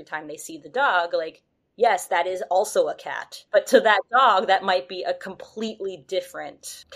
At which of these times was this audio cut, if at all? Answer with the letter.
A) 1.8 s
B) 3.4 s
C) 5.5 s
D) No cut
B